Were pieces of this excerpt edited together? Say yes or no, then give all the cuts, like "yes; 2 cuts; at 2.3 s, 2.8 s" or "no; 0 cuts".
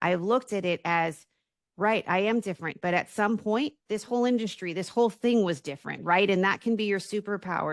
no; 0 cuts